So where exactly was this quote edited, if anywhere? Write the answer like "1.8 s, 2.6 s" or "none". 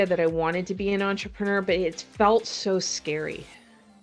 none